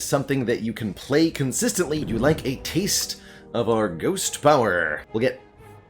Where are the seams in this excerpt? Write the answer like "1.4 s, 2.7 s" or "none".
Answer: 2.0 s, 5.0 s

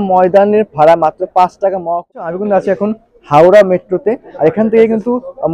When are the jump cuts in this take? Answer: 2.1 s

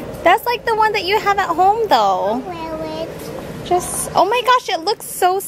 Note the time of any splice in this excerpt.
none

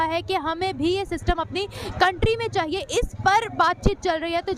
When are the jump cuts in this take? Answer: none

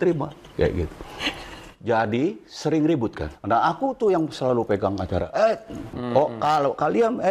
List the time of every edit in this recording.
3.3 s, 6.0 s

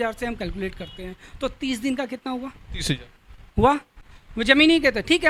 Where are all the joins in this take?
none

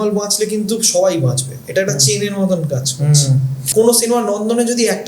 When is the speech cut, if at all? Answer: 3.6 s

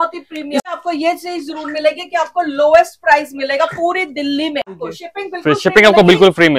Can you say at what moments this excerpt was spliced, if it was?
0.7 s, 4.9 s

